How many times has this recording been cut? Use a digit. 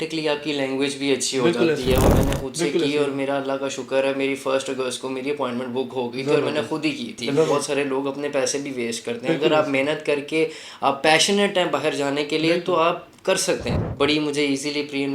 3